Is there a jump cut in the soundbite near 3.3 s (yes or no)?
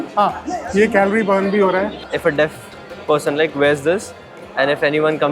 no